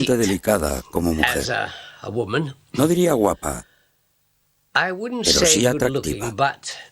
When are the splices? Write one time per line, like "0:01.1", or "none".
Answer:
none